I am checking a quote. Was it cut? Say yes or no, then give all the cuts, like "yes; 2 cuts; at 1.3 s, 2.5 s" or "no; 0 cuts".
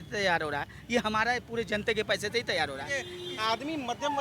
yes; 1 cut; at 3.1 s